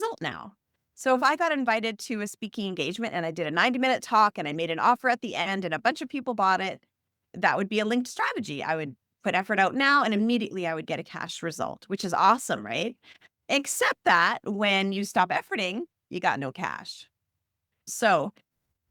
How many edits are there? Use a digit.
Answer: 1